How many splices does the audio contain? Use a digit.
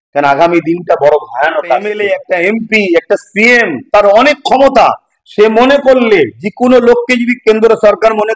1